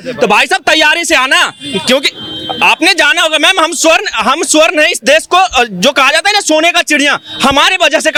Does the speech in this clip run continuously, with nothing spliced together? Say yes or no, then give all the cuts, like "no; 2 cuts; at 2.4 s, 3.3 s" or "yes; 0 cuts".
yes; 0 cuts